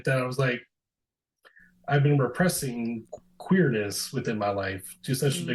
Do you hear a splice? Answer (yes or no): no